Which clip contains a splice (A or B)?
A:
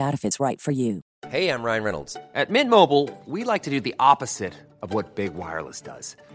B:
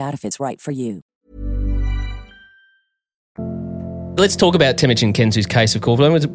A